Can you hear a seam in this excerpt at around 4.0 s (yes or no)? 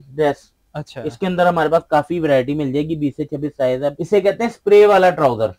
yes